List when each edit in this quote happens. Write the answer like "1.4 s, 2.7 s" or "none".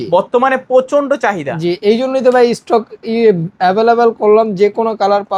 none